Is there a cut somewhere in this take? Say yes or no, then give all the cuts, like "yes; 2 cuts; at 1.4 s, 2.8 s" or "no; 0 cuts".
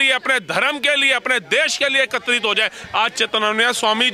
no; 0 cuts